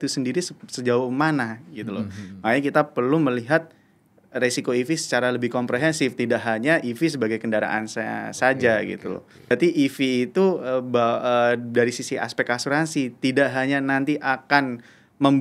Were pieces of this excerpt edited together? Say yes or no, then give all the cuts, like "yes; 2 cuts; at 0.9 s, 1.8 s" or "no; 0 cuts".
yes; 1 cut; at 9.5 s